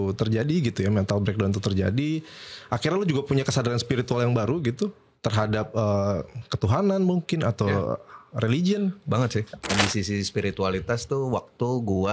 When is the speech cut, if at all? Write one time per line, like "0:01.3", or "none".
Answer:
0:09.7